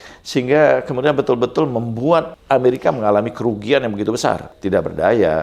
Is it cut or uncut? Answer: cut